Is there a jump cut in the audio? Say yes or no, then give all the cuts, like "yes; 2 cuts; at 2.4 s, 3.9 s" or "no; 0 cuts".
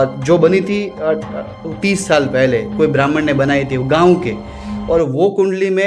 no; 0 cuts